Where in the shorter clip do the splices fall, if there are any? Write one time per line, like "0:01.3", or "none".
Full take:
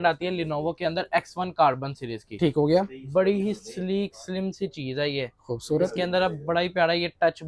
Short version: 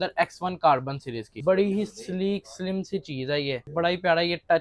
0:01.3
0:03.7

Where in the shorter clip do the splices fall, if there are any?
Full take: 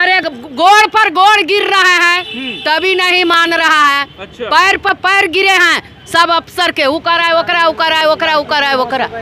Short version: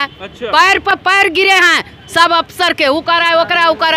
none

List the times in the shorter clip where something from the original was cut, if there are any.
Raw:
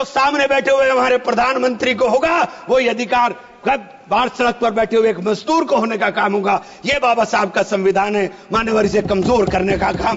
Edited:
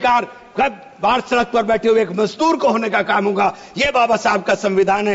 none

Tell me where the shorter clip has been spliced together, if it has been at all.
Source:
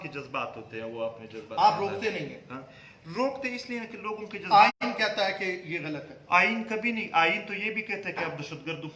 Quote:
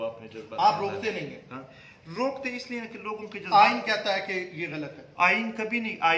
0:03.7

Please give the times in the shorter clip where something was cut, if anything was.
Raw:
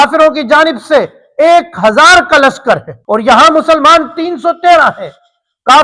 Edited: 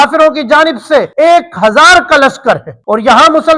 0:01.1

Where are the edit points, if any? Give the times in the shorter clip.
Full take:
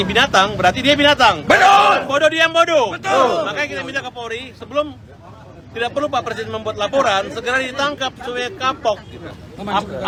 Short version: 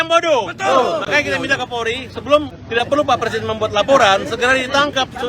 0:02.6

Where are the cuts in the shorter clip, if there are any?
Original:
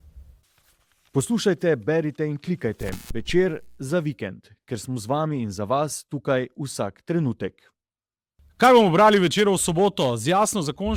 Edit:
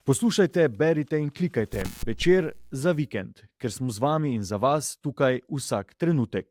none

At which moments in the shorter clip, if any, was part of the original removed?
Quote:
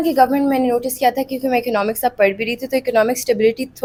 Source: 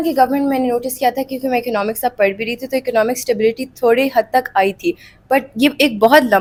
none

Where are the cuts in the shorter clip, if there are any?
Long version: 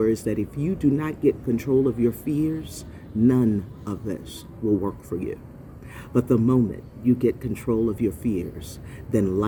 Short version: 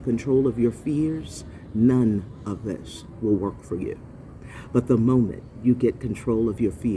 none

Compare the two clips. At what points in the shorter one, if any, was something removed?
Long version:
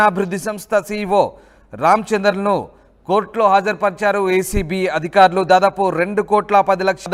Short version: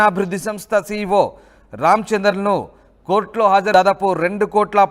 0:03.7

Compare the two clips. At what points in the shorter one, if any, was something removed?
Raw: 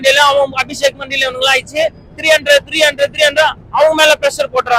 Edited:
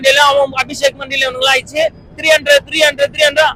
none

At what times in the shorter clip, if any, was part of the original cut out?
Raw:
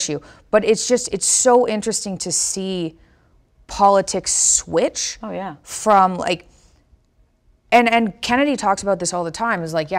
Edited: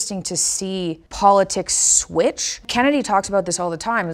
0:01.1
0:02.6

